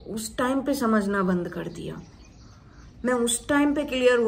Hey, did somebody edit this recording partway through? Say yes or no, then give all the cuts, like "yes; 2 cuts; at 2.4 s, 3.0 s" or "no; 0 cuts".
no; 0 cuts